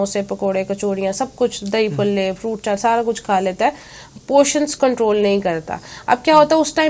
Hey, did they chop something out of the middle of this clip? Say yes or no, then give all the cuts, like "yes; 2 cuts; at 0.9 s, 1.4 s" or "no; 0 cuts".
no; 0 cuts